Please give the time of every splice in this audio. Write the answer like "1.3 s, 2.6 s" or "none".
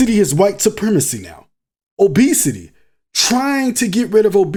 none